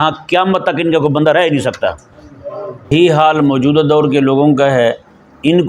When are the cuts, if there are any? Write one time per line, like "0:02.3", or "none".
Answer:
0:02.9